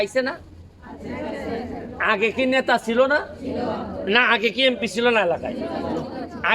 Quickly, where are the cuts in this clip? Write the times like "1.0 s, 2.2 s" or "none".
none